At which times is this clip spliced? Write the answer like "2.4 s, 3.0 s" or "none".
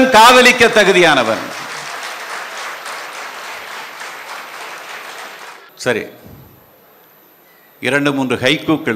none